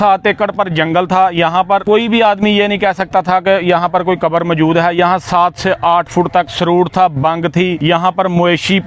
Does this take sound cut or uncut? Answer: cut